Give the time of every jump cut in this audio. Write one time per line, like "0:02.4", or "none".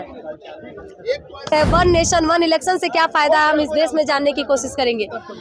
0:01.5